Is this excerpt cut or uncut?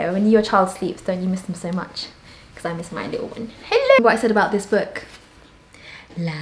cut